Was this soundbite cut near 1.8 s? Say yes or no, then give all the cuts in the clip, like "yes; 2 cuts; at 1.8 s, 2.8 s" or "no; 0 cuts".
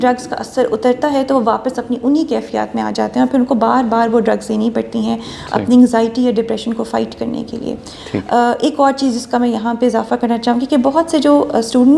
no; 0 cuts